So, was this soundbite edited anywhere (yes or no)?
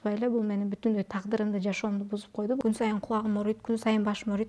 yes